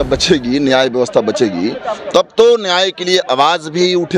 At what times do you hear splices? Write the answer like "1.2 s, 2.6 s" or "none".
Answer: none